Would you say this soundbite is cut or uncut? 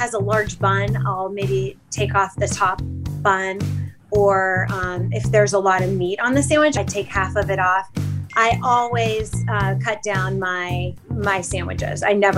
cut